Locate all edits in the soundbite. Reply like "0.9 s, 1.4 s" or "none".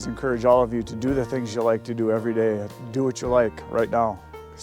2.7 s